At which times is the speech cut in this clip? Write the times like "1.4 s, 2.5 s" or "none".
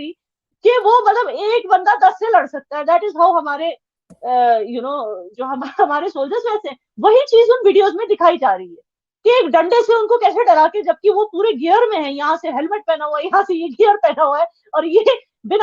none